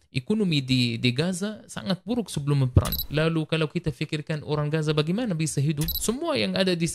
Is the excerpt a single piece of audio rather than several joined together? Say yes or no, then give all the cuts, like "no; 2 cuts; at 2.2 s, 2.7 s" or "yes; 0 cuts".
no; 2 cuts; at 3.0 s, 5.9 s